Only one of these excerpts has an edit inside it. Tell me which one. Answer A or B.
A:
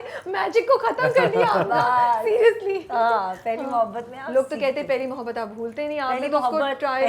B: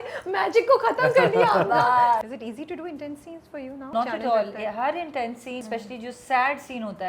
B